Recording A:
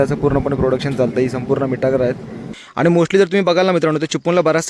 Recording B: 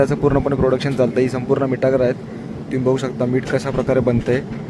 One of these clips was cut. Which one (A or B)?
A